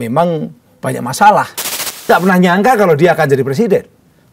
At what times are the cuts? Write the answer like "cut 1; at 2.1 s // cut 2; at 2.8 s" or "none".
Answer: cut 1; at 2.1 s